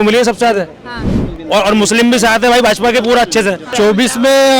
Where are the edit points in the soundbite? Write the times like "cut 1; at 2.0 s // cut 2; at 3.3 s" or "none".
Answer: cut 1; at 3.7 s